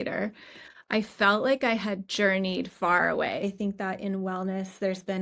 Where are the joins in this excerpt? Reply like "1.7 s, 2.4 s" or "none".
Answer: 3.4 s